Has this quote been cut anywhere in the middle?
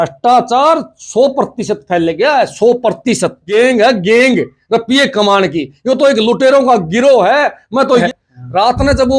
yes; 2 cuts; at 3.5 s, 8.0 s

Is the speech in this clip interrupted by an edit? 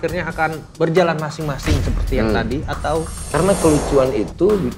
yes; 1 cut; at 3.3 s

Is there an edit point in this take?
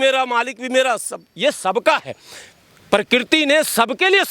no; 0 cuts

